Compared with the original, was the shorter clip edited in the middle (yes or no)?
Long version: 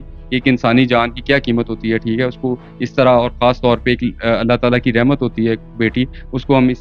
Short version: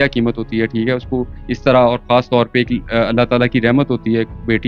no